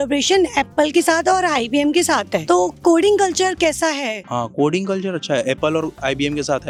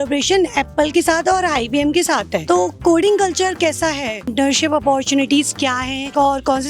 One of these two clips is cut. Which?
second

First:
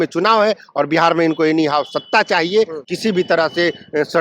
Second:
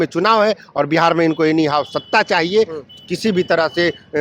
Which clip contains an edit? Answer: first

